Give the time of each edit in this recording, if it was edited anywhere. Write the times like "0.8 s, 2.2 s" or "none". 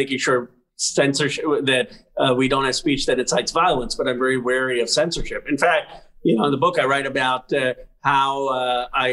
none